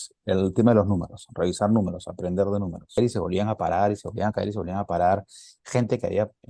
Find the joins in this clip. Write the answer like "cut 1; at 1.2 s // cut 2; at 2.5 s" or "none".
cut 1; at 3.0 s